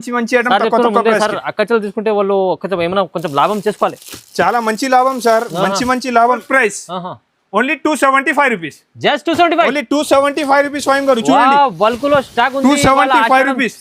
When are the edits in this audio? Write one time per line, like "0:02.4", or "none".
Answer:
0:06.4